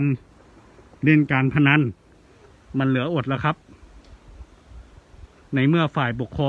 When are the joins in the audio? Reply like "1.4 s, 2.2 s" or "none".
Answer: none